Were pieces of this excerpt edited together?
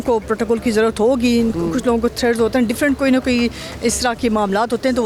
no; 0 cuts

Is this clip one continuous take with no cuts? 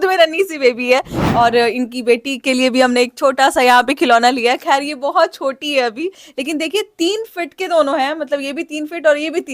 no; 2 cuts; at 1.2 s, 6.3 s

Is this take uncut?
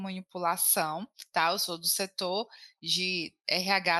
yes; 0 cuts

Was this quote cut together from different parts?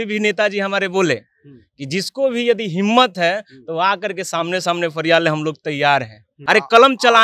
yes; 1 cut; at 6.3 s

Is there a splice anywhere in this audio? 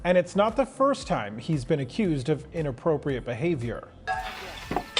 yes; 1 cut; at 4.1 s

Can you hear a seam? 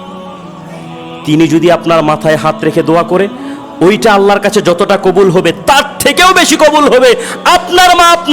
no; 0 cuts

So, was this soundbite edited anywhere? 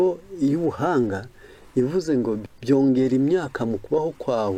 no; 0 cuts

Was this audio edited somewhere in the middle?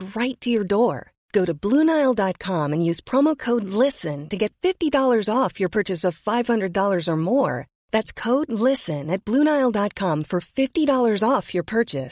no; 0 cuts

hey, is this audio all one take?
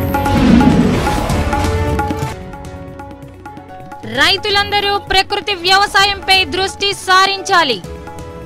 no; 2 cuts; at 2.3 s, 4.0 s

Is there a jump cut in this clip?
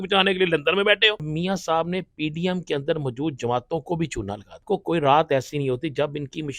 yes; 2 cuts; at 1.3 s, 4.6 s

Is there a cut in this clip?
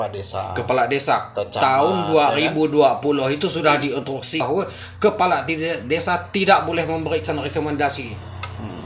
yes; 1 cut; at 4.4 s

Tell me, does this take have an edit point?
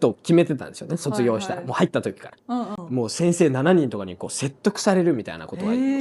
yes; 1 cut; at 2.8 s

